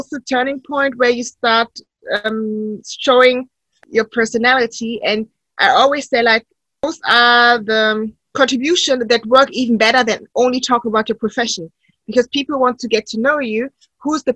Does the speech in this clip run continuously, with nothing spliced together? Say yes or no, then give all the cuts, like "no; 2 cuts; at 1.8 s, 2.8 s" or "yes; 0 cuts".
no; 2 cuts; at 3.8 s, 6.8 s